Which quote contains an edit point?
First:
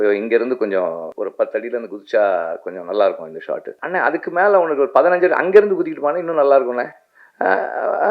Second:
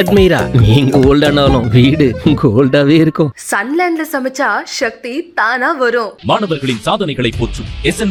first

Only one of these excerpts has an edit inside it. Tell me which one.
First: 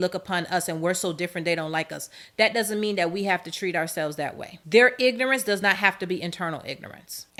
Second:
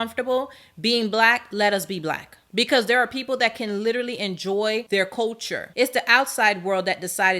second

